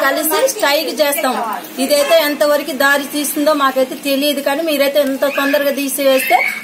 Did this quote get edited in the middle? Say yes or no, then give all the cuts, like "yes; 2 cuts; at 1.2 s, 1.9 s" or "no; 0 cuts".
no; 0 cuts